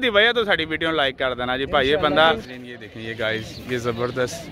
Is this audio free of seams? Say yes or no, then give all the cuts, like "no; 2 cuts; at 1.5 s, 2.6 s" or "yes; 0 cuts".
no; 1 cut; at 2.4 s